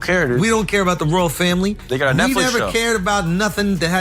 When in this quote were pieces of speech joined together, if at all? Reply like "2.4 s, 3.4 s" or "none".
none